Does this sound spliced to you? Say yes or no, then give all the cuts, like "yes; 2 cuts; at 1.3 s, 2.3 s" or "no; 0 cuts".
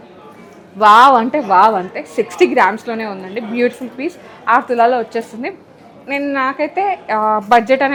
no; 0 cuts